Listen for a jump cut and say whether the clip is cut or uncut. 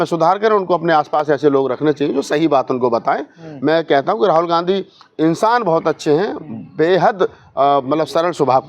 uncut